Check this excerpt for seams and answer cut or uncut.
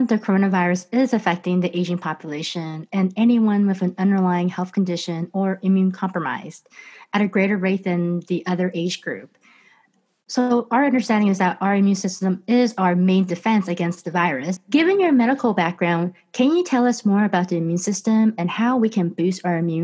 cut